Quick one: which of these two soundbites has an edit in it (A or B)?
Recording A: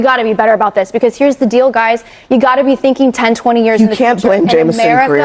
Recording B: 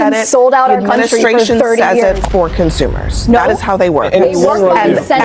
B